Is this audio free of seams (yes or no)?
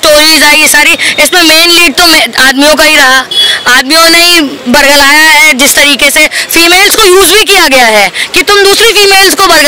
yes